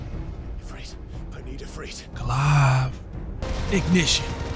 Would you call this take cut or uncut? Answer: cut